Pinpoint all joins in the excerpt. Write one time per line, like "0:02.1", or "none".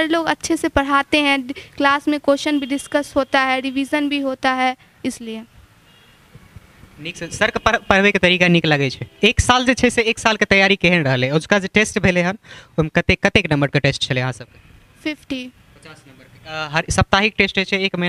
none

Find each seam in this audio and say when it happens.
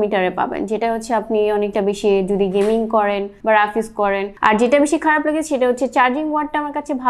0:04.3

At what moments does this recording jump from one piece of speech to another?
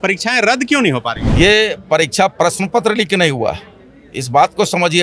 0:01.2

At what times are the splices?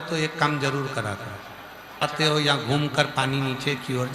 0:02.0

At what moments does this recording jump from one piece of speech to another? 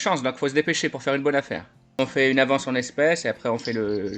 0:02.0

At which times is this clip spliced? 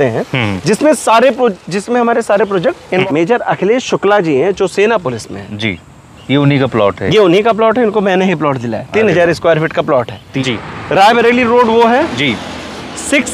0:03.0
0:10.4

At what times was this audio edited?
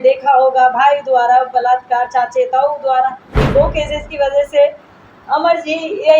0:03.3

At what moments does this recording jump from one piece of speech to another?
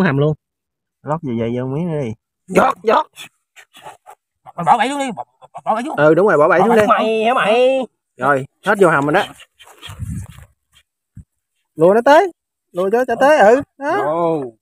0:02.4

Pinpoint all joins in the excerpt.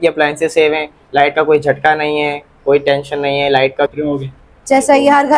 0:03.9

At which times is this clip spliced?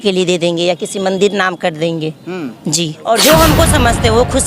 0:03.0

